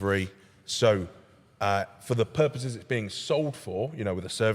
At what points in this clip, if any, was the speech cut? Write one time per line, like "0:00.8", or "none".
none